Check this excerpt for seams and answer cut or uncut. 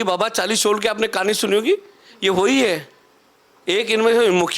uncut